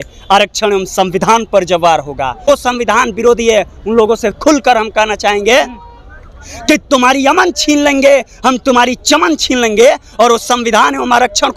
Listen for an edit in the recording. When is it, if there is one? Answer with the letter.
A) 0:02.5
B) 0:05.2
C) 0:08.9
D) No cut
A